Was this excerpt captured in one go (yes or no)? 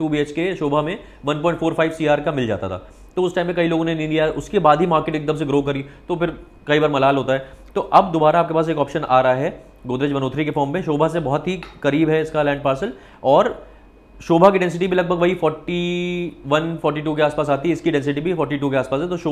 yes